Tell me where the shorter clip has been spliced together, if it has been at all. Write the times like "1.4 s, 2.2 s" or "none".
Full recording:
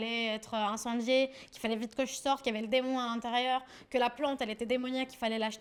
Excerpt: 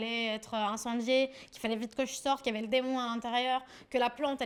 none